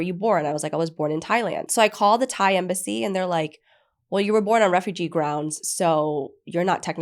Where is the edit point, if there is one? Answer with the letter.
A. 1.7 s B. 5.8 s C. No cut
A